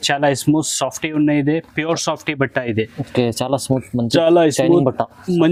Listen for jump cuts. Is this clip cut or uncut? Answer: uncut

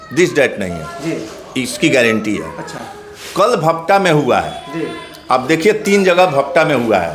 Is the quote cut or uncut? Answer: uncut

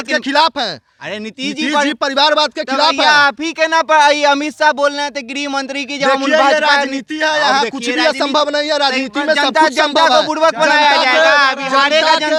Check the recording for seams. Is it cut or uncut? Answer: uncut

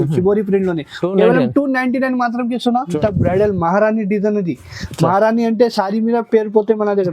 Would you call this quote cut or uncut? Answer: cut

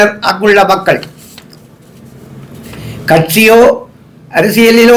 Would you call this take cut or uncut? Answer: uncut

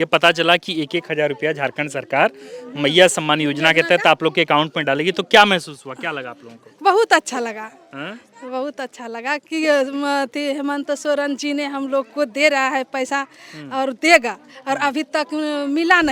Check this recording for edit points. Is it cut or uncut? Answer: uncut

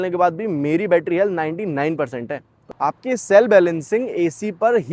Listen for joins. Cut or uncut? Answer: cut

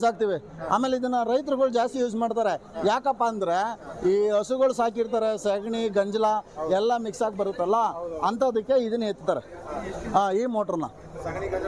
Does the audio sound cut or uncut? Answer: uncut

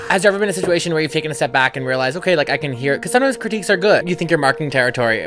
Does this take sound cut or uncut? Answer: cut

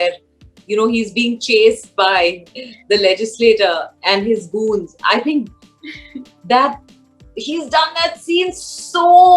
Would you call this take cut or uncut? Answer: uncut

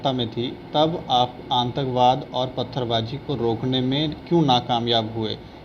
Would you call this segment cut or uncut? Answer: uncut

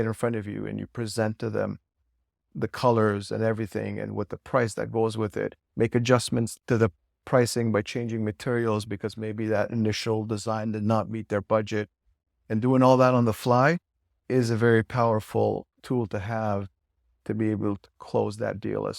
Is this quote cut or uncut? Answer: cut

